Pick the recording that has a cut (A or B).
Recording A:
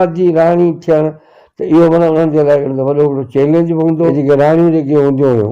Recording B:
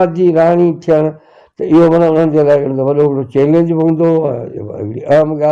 A